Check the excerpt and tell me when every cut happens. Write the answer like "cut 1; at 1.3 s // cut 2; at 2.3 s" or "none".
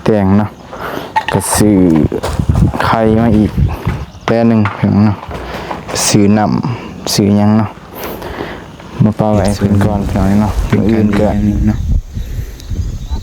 cut 1; at 11.3 s